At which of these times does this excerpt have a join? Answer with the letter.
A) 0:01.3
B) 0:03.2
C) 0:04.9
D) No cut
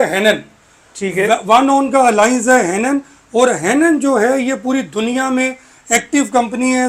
D